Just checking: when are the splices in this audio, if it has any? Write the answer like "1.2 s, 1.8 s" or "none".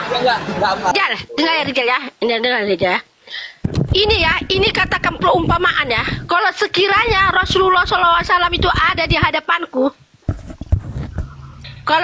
0.9 s